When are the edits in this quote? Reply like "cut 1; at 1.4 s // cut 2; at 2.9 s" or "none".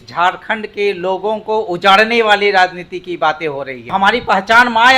cut 1; at 3.9 s